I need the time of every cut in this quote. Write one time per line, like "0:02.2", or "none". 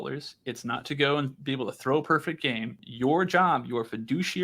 0:02.8